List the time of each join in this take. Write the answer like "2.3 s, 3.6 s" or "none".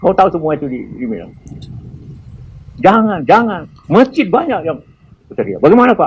3.7 s